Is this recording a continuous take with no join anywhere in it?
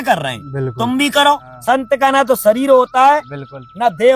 no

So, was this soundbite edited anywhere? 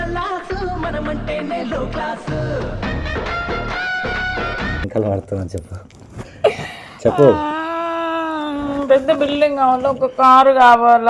no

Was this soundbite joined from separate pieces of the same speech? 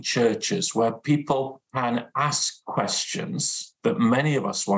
yes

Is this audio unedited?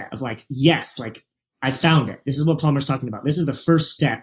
yes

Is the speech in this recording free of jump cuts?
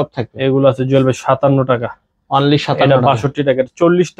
yes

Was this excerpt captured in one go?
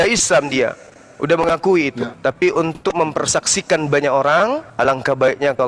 no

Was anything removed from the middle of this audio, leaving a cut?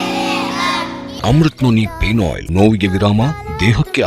yes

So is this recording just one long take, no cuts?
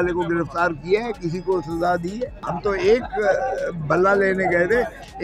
no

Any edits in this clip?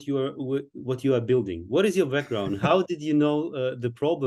no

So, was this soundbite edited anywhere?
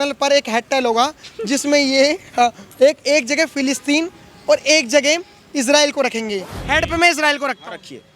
yes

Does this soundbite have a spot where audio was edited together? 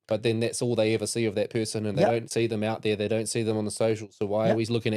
no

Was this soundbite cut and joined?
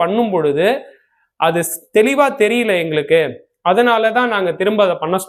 no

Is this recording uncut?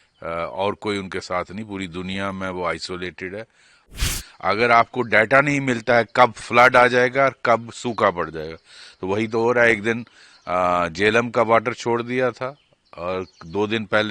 no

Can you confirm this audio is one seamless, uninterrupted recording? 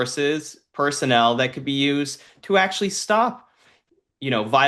yes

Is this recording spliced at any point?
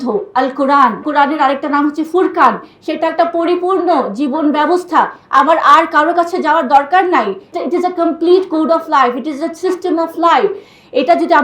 yes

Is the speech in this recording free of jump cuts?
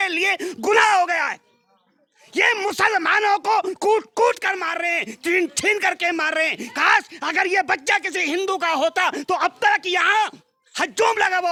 yes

